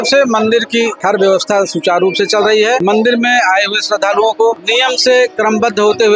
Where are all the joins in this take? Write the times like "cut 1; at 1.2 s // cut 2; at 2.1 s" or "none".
cut 1; at 1.0 s // cut 2; at 2.8 s // cut 3; at 4.6 s